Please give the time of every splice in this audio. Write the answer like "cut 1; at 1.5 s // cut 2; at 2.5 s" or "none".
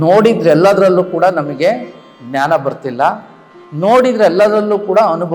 none